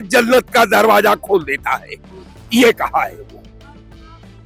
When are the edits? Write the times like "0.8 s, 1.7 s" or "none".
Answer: none